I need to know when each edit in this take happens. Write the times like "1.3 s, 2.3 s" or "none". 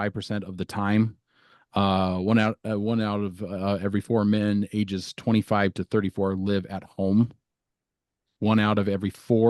none